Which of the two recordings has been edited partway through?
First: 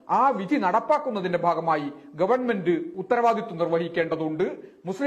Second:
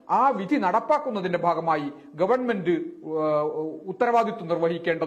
first; 1 cut; at 2.9 s

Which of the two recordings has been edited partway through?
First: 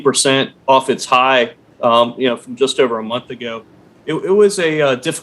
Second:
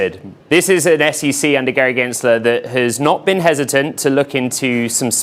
first; 1 cut; at 3.8 s

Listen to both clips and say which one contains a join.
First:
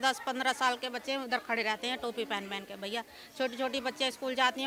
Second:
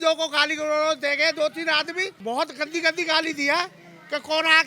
second; 1 cut; at 2.1 s

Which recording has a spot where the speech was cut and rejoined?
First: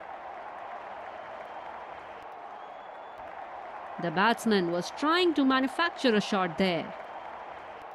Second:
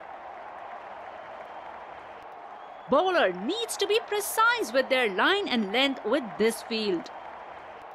second; 2 cuts; at 2.9 s, 7.0 s

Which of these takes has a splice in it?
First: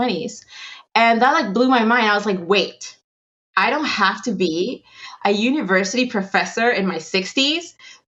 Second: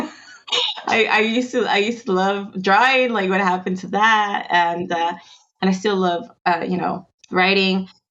second; 1 cut; at 7.1 s

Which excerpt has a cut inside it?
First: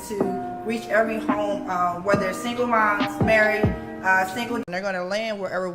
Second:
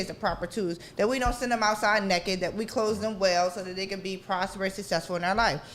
first; 1 cut; at 4.6 s

